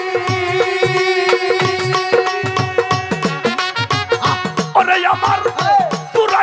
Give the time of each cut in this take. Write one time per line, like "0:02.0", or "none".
none